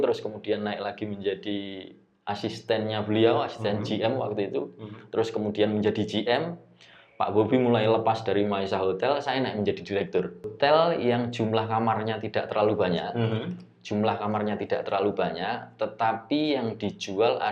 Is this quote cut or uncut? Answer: cut